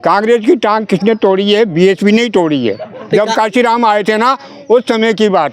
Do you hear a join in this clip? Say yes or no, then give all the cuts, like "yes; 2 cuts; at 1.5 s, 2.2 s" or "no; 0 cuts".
no; 0 cuts